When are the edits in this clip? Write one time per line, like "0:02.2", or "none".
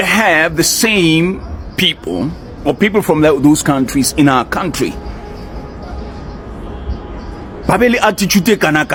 none